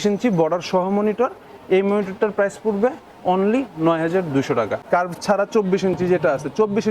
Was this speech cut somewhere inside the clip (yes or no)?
yes